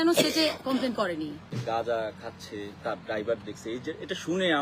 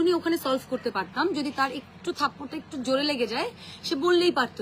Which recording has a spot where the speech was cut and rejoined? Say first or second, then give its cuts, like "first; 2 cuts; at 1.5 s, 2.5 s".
first; 1 cut; at 1.5 s